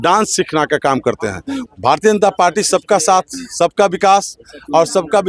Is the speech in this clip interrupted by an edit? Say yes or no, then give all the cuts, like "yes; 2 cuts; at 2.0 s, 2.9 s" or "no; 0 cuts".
yes; 1 cut; at 1.6 s